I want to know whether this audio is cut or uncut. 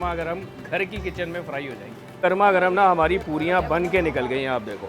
cut